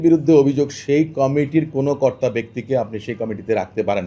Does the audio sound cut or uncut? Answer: uncut